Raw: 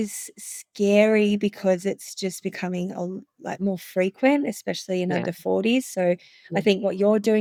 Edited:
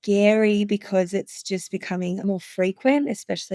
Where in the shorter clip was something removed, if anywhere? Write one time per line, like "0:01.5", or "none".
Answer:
0:02.2